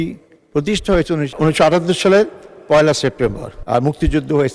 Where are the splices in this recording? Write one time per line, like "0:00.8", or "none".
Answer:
0:01.3
0:03.5